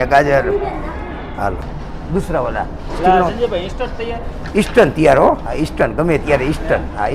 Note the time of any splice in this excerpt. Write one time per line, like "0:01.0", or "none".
0:01.8